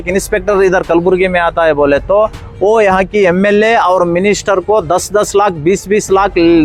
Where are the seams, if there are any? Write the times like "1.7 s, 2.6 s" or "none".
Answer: none